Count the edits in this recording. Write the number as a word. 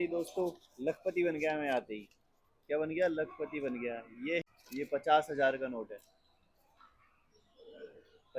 one